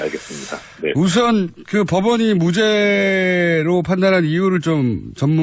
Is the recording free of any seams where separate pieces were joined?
yes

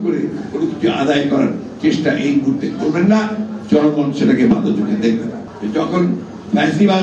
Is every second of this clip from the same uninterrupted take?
no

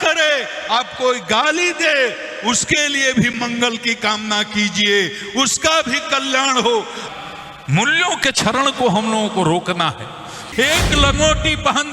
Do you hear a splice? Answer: yes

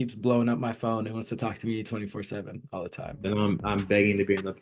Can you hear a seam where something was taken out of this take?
no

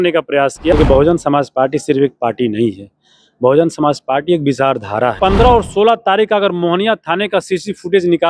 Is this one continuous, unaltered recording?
no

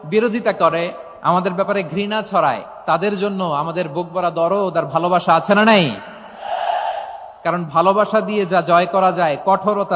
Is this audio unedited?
no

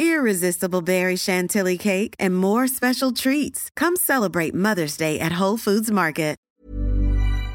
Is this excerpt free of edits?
no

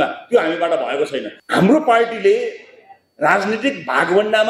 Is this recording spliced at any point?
yes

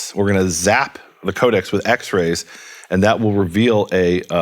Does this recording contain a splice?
yes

